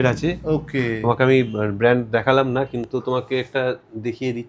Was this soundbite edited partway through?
no; 0 cuts

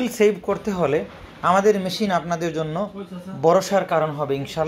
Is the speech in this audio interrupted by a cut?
no; 0 cuts

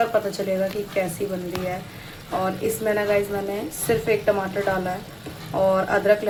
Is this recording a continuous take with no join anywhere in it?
yes; 0 cuts

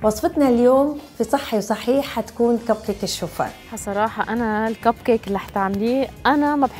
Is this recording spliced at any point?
yes; 1 cut; at 3.8 s

